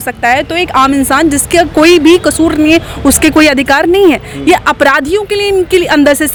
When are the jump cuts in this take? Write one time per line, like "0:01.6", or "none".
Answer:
none